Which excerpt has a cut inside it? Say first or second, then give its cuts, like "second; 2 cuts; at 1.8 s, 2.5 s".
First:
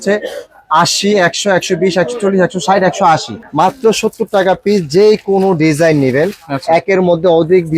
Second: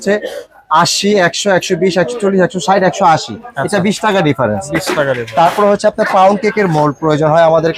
first; 1 cut; at 3.4 s